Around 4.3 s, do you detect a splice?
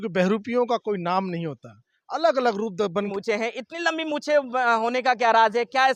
no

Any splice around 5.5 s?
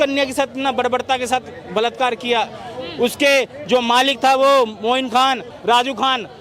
yes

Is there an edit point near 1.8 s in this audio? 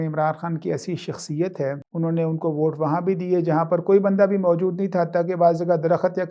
yes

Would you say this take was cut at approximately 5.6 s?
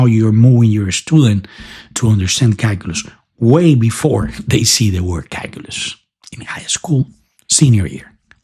no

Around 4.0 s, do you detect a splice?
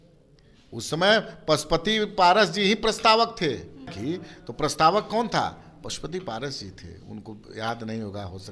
yes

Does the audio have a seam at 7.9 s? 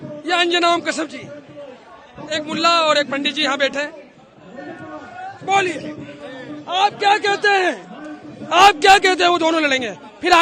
no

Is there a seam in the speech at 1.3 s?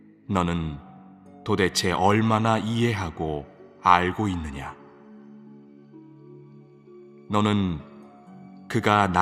yes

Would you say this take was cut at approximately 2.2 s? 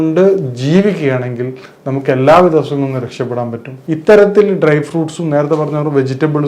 no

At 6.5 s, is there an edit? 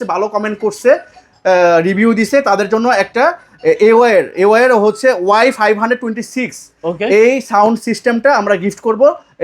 no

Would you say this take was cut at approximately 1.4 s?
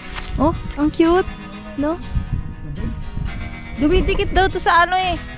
no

